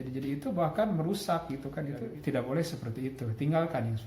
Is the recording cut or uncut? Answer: cut